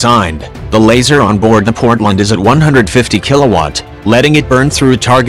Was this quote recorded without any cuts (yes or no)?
no